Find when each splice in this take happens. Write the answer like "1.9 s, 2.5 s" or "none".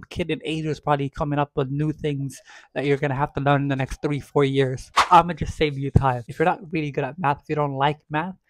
5.0 s, 6.3 s

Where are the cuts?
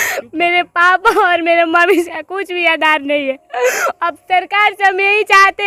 none

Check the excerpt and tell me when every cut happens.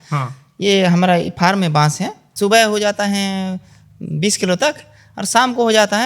2.2 s

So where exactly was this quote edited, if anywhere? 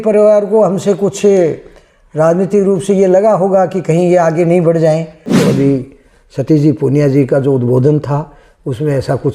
5.4 s

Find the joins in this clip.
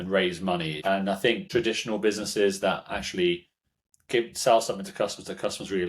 1.2 s

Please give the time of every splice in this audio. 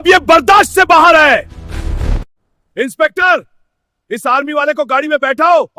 2.2 s

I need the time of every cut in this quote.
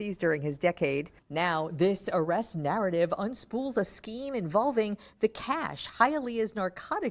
1.1 s

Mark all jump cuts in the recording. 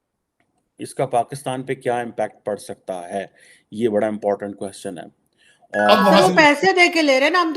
5.9 s

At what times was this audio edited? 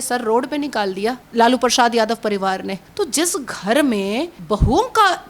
1.2 s, 2.8 s, 4.4 s

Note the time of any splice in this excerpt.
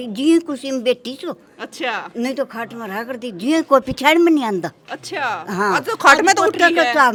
none

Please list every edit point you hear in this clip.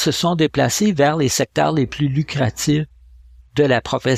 none

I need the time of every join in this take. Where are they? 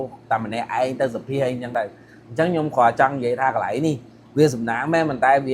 none

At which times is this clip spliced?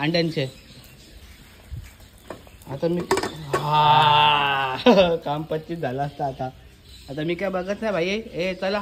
none

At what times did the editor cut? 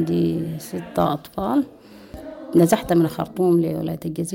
none

